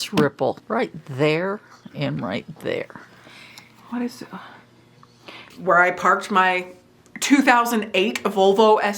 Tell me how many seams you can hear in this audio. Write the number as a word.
one